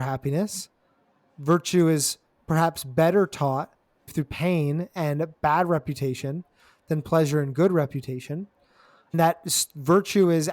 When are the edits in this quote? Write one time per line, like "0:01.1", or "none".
0:09.1